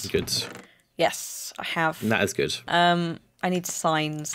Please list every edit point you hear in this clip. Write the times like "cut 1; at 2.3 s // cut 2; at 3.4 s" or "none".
cut 1; at 2.5 s